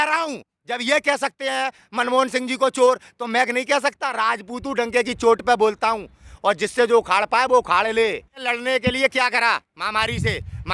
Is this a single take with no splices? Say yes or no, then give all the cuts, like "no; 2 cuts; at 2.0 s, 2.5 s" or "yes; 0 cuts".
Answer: no; 1 cut; at 8.5 s